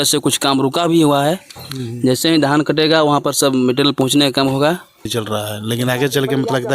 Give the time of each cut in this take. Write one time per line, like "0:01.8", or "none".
0:05.1